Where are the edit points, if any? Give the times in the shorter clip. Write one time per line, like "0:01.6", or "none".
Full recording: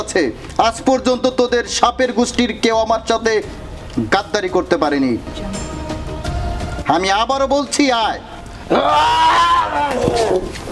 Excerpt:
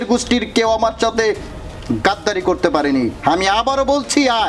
0:03.2